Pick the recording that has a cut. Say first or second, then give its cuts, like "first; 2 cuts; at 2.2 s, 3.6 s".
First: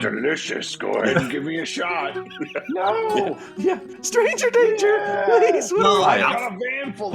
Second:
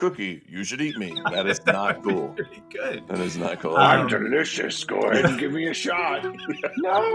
first; 2 cuts; at 4.0 s, 6.0 s